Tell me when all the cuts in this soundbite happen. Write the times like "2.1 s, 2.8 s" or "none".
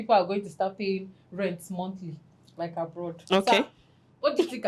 none